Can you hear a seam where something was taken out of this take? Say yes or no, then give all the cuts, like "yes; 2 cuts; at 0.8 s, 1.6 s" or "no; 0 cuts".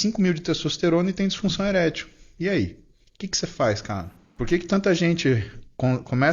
yes; 1 cut; at 4.2 s